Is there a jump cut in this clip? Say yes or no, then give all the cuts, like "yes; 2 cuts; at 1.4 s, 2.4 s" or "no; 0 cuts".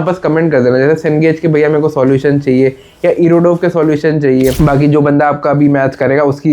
yes; 1 cut; at 4.6 s